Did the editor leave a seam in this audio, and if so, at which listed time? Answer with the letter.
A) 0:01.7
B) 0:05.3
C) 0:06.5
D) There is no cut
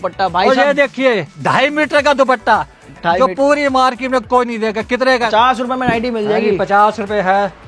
B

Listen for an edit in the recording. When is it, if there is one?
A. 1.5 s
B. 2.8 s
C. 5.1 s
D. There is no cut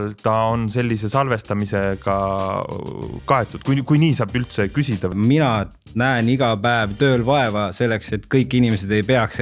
C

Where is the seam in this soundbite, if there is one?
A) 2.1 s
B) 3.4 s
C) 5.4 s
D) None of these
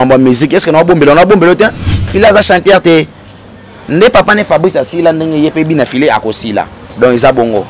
A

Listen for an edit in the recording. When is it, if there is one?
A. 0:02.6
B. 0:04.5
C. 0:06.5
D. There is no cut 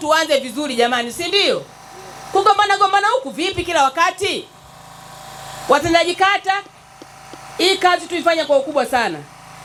D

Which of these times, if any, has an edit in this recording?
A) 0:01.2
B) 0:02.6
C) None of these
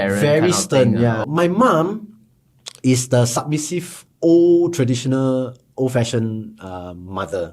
A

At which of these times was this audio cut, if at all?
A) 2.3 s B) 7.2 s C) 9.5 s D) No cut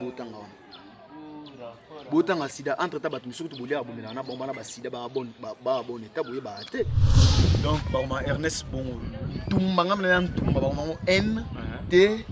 B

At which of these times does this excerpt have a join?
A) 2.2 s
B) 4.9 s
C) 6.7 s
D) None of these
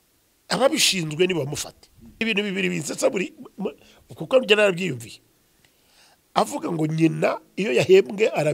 A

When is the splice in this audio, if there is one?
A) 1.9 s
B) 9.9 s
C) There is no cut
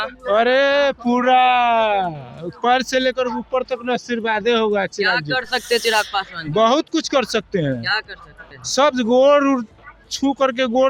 C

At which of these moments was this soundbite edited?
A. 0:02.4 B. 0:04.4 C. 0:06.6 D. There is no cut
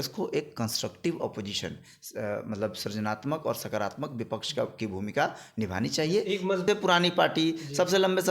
C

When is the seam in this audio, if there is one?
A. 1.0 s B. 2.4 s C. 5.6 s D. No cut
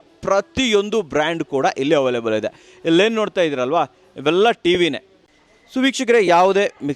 C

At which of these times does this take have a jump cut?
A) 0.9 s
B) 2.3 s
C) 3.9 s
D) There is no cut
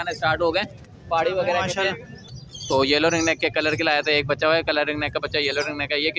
B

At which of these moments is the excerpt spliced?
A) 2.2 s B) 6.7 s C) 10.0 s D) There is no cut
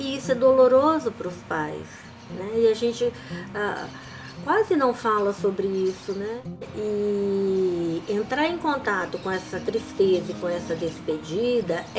B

